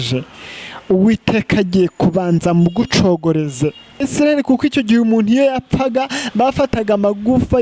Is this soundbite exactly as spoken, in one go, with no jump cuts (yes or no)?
no